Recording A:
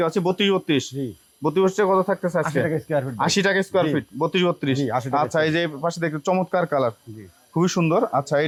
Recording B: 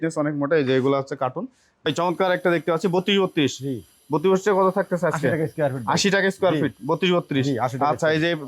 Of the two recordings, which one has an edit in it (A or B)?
B